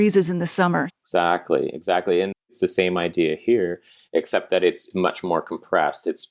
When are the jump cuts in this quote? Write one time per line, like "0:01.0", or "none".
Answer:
0:01.0
0:02.5